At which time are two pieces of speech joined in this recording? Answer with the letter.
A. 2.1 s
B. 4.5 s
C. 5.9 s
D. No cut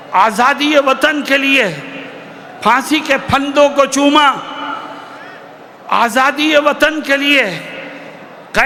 D